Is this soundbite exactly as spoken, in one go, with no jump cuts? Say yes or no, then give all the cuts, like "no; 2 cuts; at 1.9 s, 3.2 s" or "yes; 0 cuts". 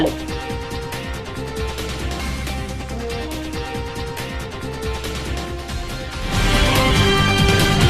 no; 1 cut; at 6.9 s